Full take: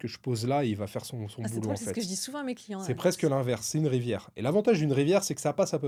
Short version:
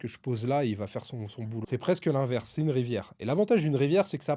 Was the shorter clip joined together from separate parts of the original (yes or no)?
yes